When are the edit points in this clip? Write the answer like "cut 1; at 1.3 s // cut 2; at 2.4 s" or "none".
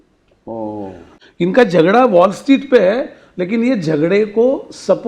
cut 1; at 1.1 s